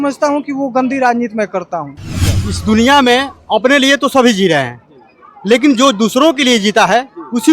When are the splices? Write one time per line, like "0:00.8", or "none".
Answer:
0:02.5